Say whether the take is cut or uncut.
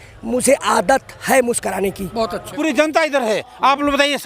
cut